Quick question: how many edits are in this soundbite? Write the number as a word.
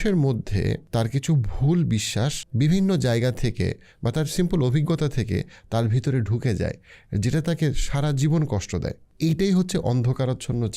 three